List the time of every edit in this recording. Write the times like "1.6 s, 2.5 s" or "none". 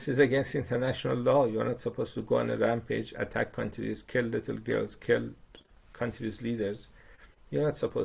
none